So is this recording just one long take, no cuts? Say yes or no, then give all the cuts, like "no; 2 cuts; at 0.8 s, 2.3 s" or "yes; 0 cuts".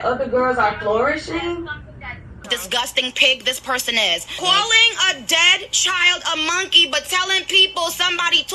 no; 1 cut; at 2.3 s